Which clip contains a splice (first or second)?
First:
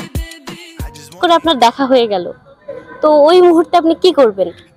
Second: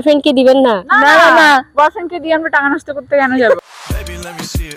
first